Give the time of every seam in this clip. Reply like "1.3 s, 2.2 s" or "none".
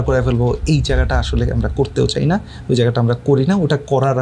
none